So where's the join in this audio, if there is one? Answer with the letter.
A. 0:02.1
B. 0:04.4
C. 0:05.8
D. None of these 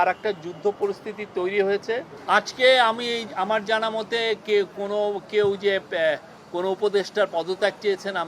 A